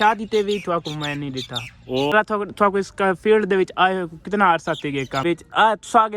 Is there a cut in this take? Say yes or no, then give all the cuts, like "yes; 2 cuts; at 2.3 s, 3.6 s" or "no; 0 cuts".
yes; 2 cuts; at 2.1 s, 5.2 s